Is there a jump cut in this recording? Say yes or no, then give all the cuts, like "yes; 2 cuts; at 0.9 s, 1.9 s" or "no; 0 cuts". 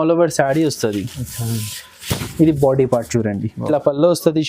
yes; 1 cut; at 3.5 s